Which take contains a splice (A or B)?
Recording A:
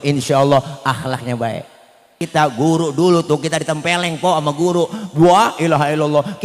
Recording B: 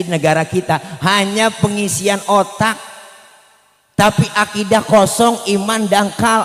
A